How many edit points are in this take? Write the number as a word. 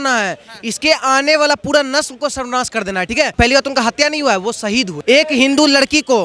two